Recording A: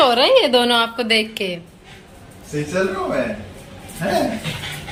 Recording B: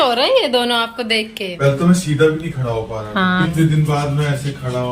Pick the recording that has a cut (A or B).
B